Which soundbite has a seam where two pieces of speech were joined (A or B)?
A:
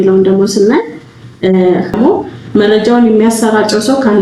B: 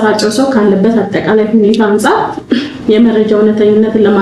A